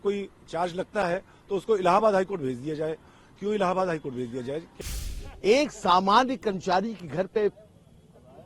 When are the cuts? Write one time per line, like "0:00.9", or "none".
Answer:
0:04.7